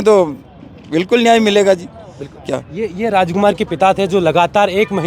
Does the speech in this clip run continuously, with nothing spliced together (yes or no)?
yes